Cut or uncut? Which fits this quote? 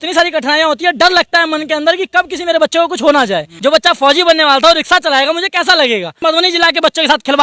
cut